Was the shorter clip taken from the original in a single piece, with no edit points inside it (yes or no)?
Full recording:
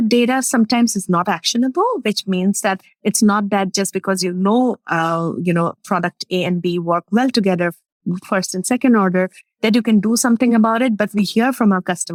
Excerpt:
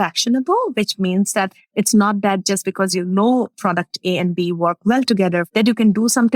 no